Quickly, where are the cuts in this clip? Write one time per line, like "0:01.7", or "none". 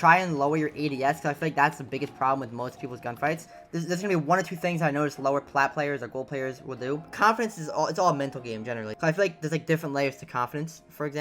0:03.6
0:07.1
0:08.9